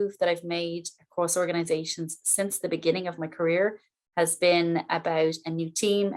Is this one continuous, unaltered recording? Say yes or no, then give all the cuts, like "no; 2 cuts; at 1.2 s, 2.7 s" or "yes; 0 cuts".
yes; 0 cuts